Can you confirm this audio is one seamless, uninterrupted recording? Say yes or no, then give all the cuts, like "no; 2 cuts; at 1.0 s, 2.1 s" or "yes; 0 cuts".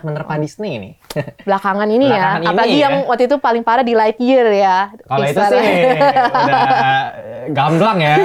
yes; 0 cuts